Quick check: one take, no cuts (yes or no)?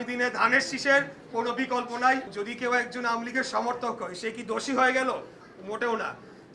no